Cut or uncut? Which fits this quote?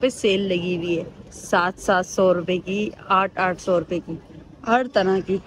uncut